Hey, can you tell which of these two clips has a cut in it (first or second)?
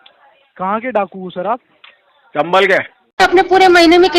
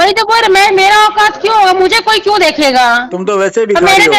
first